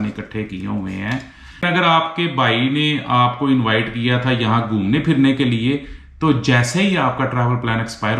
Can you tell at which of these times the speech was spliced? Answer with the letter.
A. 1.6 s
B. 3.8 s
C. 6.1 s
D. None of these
A